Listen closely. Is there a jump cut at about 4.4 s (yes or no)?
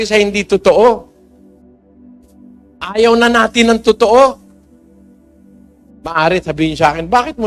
no